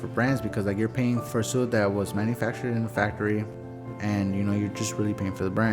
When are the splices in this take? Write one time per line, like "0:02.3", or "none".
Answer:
0:01.2
0:03.5